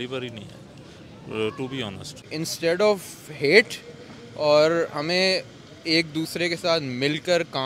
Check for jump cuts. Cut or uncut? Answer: cut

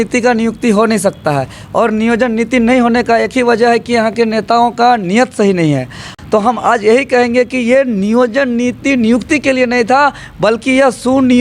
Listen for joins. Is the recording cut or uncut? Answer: cut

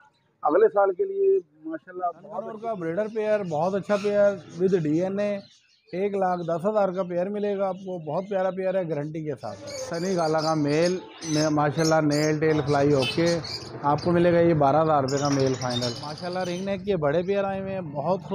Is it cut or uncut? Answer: cut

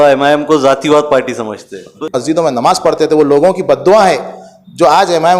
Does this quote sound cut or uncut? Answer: cut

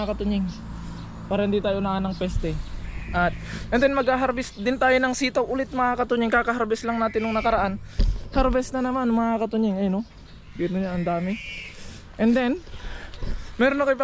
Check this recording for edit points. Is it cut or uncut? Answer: uncut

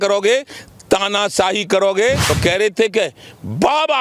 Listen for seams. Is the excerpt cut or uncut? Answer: cut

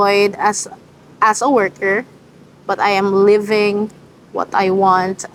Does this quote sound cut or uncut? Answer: uncut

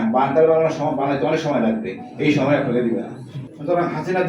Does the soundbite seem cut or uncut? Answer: cut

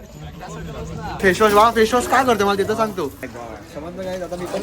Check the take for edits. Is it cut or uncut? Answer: cut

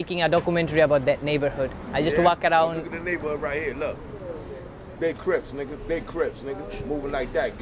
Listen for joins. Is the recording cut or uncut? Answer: uncut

